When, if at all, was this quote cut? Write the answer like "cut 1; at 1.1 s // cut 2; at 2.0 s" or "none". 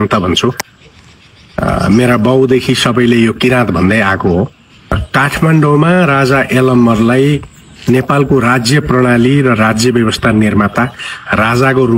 cut 1; at 5.0 s